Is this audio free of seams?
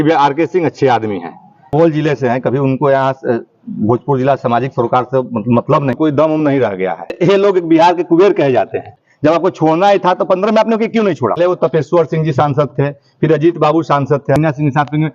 no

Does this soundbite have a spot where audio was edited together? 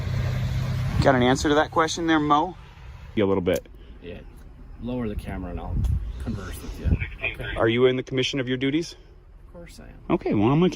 yes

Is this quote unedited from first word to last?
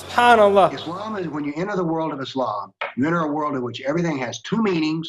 no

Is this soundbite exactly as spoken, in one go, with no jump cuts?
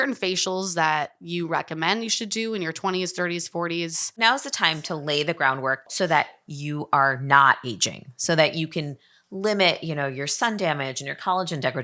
no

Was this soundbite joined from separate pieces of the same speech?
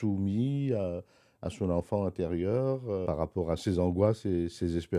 yes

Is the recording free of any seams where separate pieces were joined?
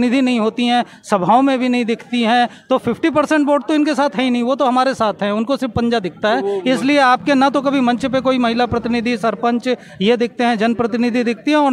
yes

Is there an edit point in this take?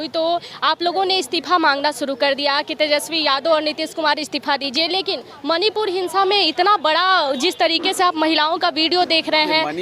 no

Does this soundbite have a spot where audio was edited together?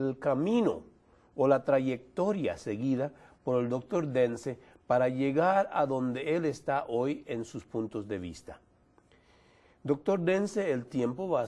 yes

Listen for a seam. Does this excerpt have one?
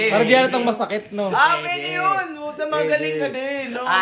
no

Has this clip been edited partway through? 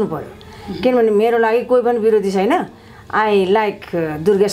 no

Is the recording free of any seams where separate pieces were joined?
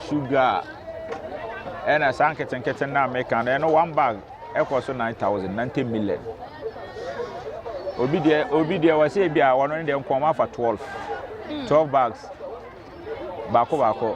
yes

